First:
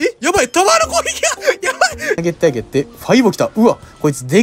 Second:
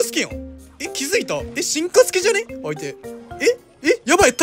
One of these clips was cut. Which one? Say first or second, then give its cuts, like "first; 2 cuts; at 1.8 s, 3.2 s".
first; 1 cut; at 2.2 s